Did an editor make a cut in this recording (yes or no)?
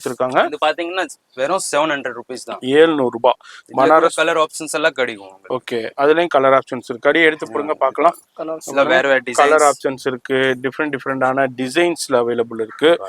no